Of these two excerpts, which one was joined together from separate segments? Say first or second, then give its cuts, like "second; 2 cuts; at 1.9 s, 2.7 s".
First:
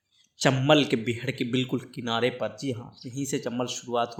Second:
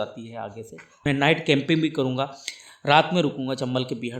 second; 1 cut; at 0.9 s